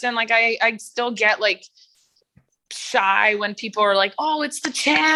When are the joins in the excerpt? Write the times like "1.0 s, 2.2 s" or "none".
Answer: none